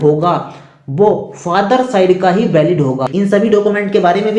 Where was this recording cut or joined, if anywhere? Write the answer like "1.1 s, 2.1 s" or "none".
3.1 s